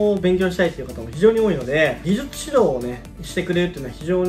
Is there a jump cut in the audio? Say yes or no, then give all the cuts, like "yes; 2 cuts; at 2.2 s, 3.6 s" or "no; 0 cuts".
no; 0 cuts